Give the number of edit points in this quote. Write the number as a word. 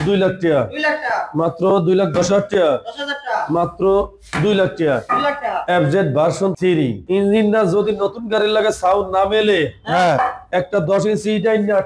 two